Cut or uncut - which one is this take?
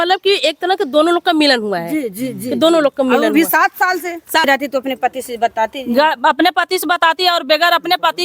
cut